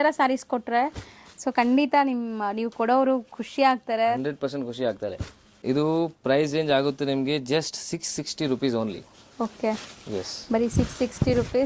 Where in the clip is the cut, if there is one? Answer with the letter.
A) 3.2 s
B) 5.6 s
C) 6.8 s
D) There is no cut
B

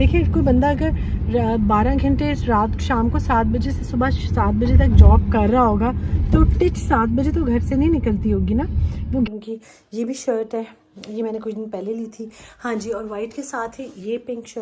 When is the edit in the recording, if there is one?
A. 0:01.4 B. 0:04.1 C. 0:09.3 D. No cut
C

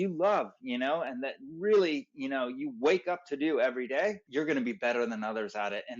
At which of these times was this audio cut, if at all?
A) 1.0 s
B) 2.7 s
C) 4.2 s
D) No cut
C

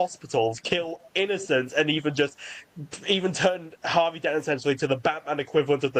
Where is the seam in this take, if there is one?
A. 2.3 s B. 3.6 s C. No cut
C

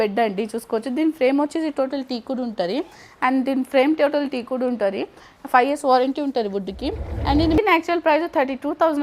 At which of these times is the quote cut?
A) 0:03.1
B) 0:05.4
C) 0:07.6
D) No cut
C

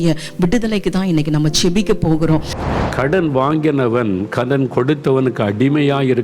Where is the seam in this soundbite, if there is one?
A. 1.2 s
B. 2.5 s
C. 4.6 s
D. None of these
B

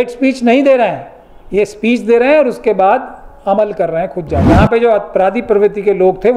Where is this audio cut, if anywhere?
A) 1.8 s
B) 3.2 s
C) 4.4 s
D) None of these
C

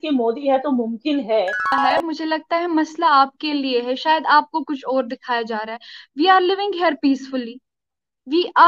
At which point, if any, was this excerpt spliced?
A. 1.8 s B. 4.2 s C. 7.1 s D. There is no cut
A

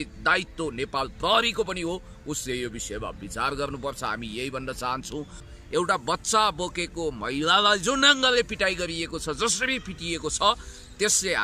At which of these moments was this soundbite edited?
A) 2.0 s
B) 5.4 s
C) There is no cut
B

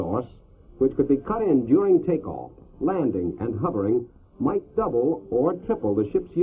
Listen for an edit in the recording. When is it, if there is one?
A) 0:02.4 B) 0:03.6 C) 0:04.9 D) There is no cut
C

